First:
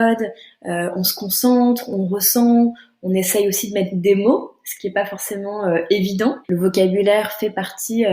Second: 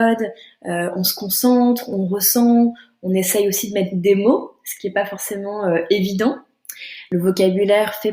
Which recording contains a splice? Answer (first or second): first